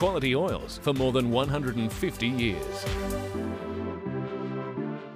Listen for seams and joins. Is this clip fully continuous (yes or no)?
no